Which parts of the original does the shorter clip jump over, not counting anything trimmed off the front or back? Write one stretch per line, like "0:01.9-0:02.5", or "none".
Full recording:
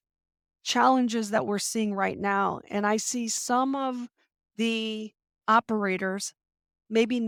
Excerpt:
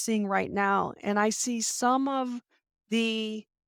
none

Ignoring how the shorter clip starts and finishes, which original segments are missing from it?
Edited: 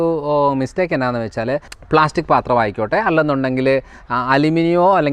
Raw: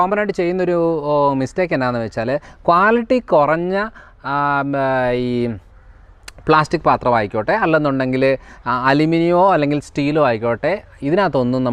0:02.5-0:06.3

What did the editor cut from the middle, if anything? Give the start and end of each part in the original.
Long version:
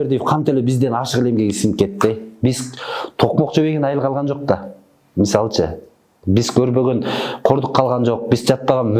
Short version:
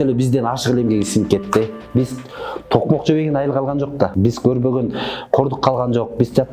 0:04.6-0:06.2

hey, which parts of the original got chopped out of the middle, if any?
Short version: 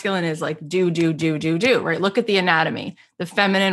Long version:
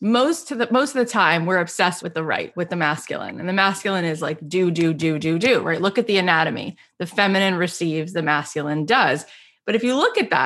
none

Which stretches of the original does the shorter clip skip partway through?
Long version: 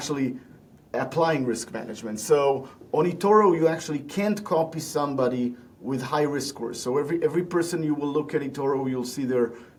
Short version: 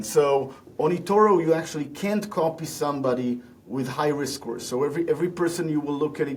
none

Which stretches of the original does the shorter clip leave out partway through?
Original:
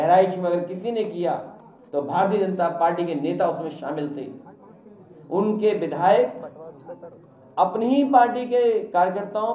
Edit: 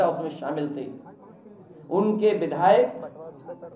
none

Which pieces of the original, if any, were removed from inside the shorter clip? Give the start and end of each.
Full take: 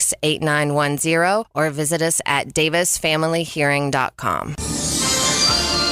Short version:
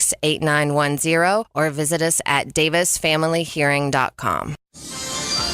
0:04.6-0:04.7

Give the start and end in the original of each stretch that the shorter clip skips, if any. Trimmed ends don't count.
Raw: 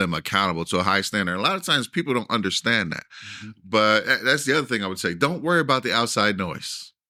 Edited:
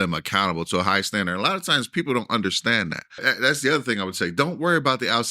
0:03.3-0:04.1

